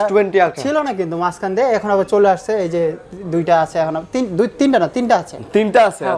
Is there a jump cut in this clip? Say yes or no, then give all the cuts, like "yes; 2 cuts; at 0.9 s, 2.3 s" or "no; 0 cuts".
no; 0 cuts